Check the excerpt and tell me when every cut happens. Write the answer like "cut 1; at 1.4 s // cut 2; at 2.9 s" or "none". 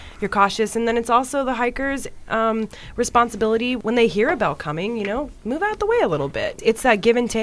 cut 1; at 3.8 s // cut 2; at 6.5 s